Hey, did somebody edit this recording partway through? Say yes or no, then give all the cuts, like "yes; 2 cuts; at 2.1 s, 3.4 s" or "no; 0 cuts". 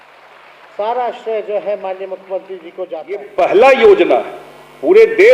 yes; 1 cut; at 3.3 s